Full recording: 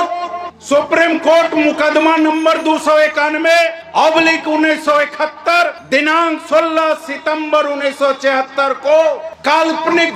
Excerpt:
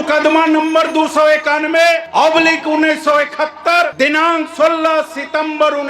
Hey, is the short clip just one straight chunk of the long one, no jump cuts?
no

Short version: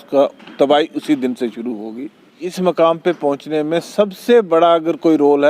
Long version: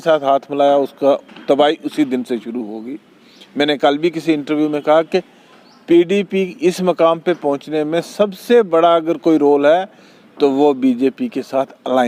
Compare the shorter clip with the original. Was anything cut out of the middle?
yes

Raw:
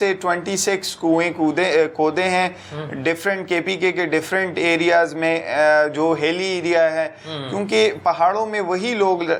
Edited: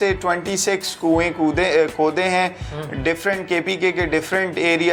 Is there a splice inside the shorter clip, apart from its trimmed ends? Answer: no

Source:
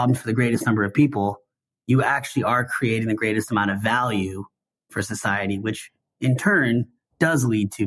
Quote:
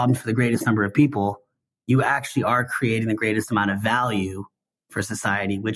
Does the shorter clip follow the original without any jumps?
yes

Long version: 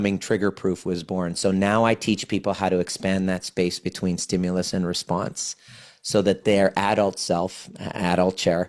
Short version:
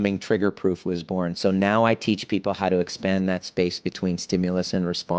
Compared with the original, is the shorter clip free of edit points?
yes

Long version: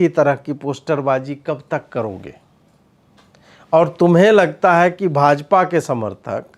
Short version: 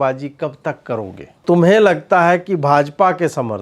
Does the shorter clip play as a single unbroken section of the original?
no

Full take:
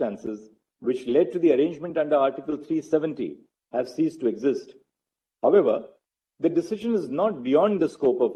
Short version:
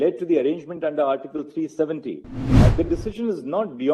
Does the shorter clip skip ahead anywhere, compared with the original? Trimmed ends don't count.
yes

